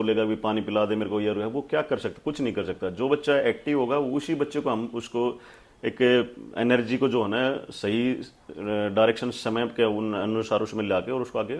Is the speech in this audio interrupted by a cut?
no; 0 cuts

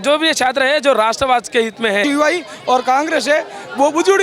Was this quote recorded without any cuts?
no; 1 cut; at 2.0 s

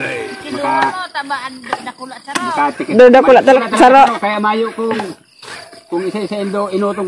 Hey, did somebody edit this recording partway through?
yes; 1 cut; at 3.6 s

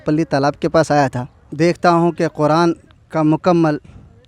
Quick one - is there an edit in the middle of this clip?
yes; 1 cut; at 1.4 s

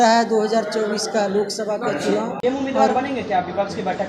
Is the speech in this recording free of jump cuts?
no; 1 cut; at 2.3 s

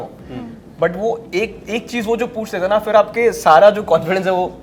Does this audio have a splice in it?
no; 0 cuts

